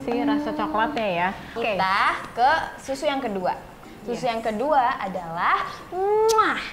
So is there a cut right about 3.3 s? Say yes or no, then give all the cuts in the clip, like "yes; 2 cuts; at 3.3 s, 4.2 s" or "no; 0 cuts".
no; 1 cut; at 1.6 s